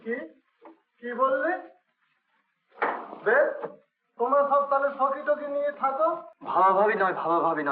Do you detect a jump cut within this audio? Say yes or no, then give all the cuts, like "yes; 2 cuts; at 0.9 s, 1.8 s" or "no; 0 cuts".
yes; 1 cut; at 6.3 s